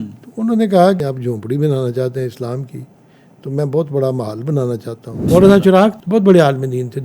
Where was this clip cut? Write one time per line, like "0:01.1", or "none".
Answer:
0:01.0
0:05.3
0:06.0